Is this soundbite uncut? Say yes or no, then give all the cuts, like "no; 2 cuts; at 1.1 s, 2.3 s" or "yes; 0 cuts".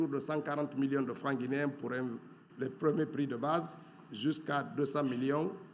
yes; 0 cuts